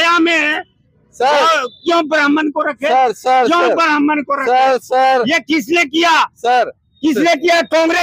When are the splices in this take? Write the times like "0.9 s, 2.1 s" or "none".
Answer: none